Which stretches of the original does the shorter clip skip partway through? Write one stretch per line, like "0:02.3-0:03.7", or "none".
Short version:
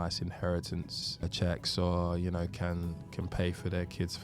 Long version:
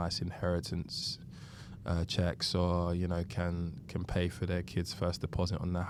0:01.2-0:02.0